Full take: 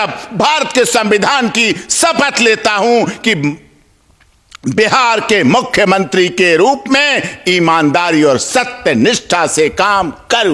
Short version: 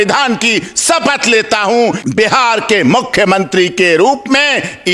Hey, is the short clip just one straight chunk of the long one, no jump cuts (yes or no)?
no